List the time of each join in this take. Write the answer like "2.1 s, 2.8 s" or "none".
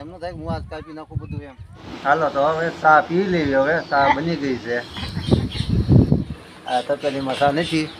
1.4 s